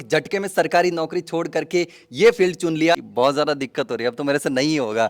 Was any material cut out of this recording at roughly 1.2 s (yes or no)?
no